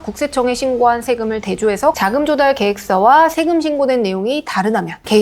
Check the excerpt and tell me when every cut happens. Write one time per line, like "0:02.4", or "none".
0:02.0